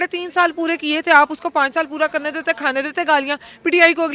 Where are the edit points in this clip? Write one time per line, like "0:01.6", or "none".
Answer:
none

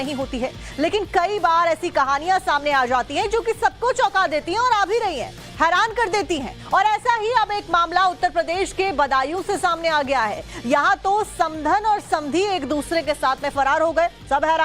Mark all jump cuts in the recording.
0:02.9

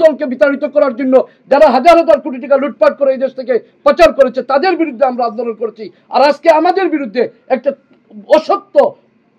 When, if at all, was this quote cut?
none

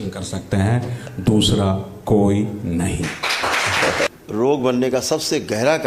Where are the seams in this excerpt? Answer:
0:04.1

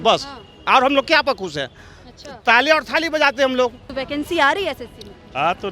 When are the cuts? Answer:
0:03.9

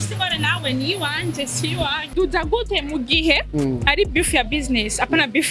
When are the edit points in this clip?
0:02.1

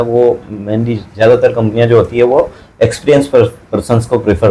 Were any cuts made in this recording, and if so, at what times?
none

